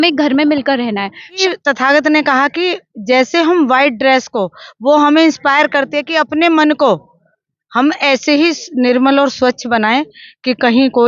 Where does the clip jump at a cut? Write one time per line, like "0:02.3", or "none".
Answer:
0:01.4